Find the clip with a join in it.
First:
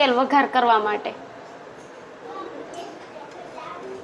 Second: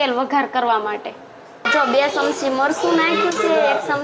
second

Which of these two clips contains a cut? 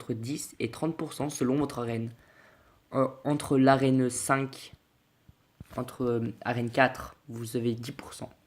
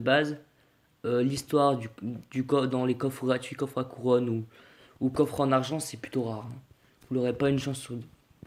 first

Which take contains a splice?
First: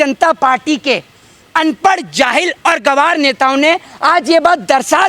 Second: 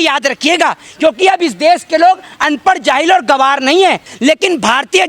second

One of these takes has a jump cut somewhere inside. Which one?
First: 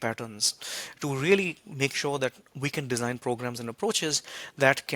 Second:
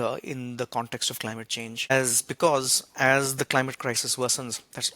second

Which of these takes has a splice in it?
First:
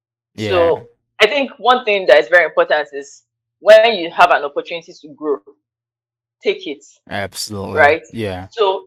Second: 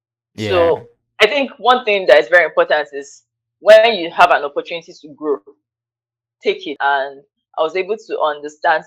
second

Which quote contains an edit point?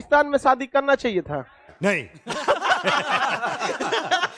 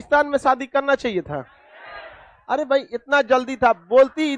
second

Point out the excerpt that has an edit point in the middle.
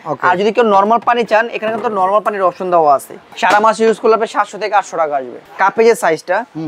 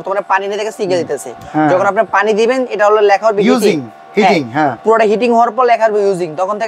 first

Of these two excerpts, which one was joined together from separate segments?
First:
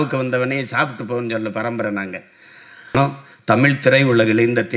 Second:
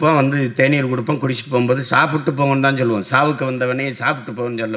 first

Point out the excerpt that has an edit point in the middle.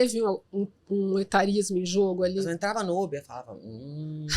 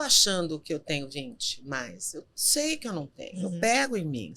first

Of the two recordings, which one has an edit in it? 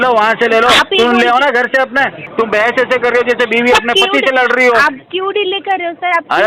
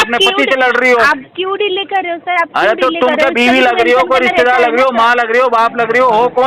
first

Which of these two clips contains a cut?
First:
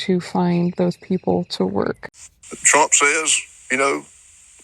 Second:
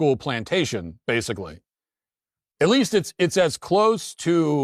first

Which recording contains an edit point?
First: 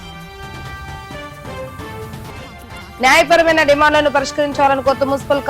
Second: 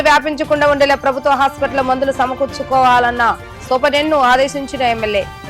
first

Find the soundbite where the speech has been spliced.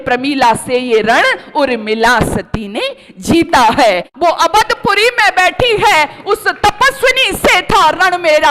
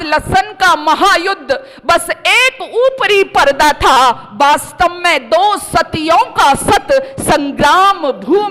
first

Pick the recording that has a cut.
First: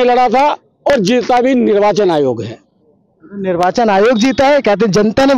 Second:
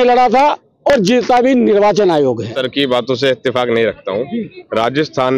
second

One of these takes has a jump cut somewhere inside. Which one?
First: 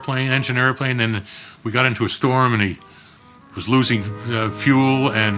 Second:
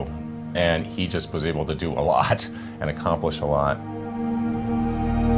second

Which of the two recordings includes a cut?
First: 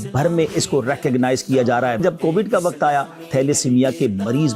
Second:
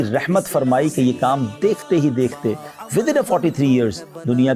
first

